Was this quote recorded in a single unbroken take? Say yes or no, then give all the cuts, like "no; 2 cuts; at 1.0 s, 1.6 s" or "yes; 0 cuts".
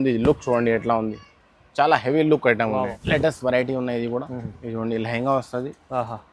no; 1 cut; at 3.0 s